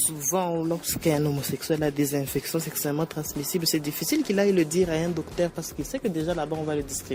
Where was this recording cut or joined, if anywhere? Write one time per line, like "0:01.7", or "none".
none